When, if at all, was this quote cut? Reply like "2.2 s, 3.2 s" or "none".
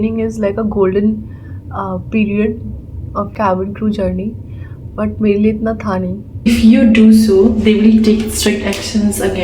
3.3 s, 6.5 s